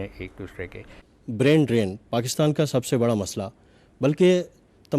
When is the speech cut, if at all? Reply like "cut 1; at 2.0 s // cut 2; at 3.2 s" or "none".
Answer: cut 1; at 1.0 s